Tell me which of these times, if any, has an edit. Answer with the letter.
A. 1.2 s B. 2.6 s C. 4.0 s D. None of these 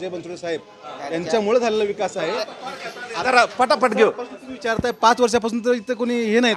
D